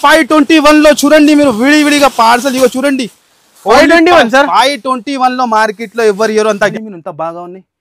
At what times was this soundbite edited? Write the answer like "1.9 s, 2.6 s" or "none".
6.7 s